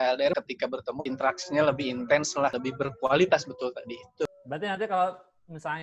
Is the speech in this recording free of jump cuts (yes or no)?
no